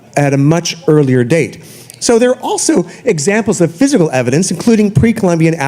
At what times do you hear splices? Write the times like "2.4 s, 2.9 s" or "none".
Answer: none